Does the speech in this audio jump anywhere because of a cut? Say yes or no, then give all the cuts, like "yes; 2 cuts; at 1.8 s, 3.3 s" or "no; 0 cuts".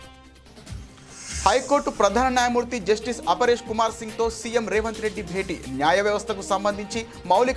yes; 1 cut; at 1.4 s